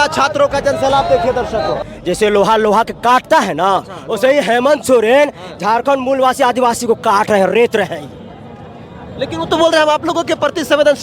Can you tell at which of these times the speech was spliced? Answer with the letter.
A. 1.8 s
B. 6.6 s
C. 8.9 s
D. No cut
A